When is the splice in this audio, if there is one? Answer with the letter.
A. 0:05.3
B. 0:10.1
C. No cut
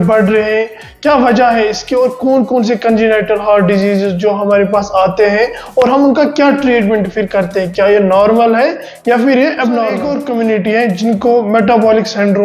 B